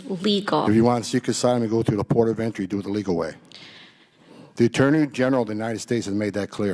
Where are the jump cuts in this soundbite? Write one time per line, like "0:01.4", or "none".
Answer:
none